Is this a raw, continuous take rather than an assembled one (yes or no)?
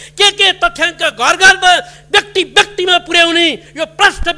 yes